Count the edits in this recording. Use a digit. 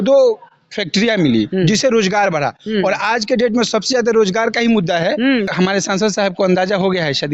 1